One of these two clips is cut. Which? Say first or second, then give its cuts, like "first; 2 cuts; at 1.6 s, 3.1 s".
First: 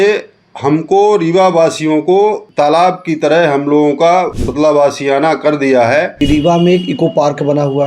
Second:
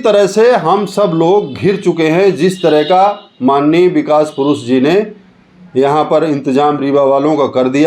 first; 3 cuts; at 2.4 s, 4.3 s, 6.1 s